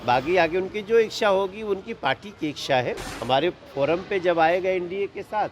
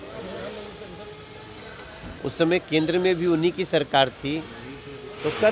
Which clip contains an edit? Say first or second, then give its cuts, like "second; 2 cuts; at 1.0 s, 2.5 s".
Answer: first; 1 cut; at 3.1 s